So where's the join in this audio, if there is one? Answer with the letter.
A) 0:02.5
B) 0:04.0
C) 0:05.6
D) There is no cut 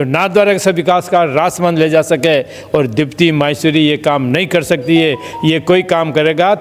D